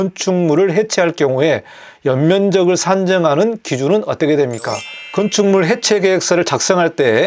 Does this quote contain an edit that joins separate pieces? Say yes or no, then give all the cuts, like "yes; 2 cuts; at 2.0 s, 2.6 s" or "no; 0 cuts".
yes; 1 cut; at 5.0 s